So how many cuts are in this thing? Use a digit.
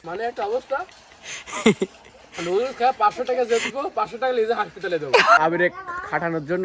1